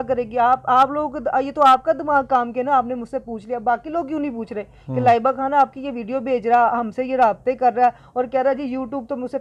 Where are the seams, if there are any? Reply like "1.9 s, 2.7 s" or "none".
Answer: none